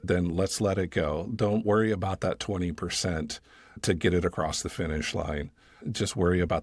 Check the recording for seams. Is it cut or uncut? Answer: uncut